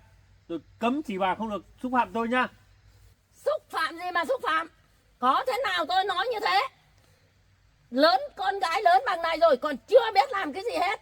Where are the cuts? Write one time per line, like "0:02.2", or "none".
none